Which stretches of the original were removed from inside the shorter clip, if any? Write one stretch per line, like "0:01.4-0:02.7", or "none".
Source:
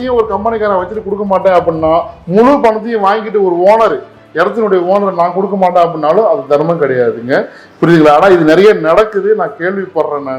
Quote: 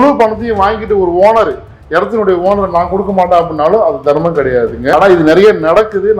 0:07.4-0:08.1